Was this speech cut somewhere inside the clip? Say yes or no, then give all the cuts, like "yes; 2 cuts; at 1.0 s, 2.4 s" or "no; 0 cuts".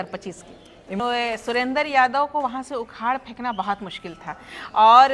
yes; 1 cut; at 1.0 s